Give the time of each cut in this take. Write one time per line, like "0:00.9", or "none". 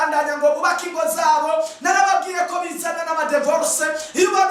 none